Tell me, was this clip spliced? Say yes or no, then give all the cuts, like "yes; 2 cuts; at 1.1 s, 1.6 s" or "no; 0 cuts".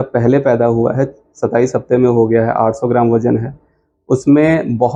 no; 0 cuts